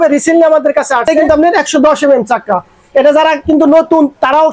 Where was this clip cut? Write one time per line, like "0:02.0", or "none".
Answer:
0:01.3

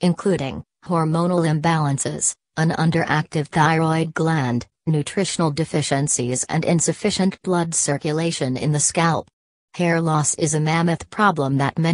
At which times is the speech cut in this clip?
0:09.3

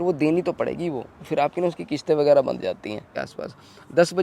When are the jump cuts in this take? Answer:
0:03.1

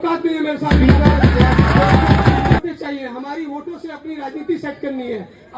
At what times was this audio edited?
0:02.6

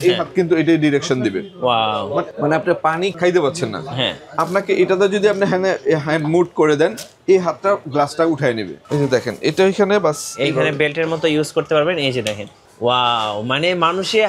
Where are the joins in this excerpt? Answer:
0:08.7

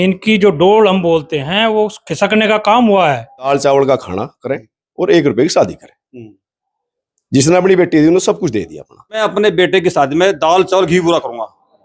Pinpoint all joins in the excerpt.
0:03.5
0:09.2

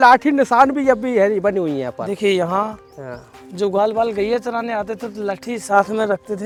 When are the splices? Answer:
none

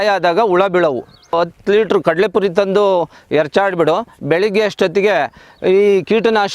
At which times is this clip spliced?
0:01.3

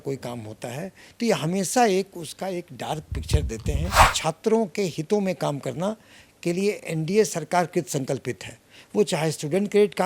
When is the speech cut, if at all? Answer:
0:04.1

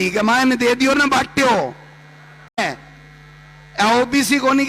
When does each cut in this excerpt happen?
0:02.6

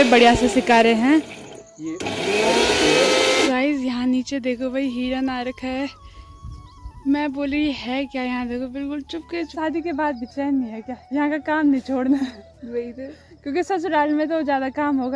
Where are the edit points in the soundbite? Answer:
0:03.4
0:09.5

